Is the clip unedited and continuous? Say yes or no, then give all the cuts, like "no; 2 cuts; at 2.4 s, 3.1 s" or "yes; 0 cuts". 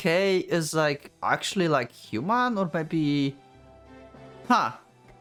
yes; 0 cuts